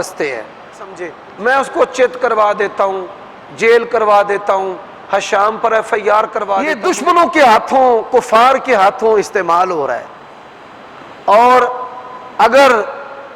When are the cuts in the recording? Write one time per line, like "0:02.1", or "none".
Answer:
0:01.2
0:06.7